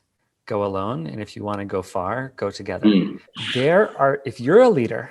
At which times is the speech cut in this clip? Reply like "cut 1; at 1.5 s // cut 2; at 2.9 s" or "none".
cut 1; at 3.2 s